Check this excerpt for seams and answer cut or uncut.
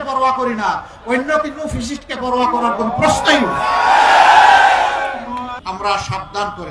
cut